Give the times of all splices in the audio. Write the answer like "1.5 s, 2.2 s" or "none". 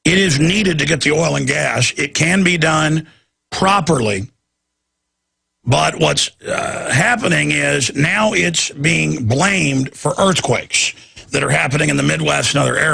7.1 s